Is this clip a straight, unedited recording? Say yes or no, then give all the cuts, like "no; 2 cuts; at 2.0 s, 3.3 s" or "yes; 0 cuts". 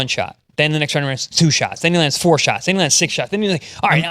yes; 0 cuts